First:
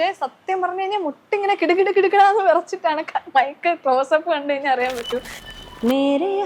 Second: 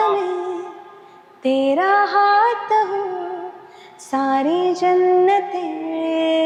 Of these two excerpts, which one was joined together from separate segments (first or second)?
first